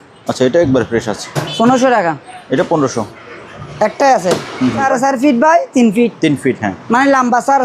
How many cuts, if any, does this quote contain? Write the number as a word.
two